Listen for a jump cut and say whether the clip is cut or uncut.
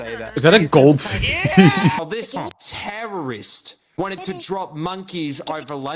cut